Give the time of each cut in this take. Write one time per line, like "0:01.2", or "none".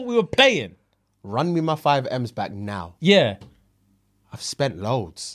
none